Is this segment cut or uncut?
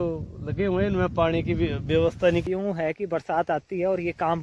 cut